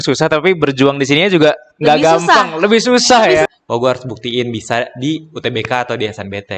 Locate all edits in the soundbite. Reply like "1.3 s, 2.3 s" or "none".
3.4 s